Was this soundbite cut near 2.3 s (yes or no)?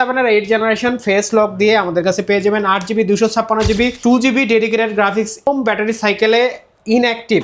no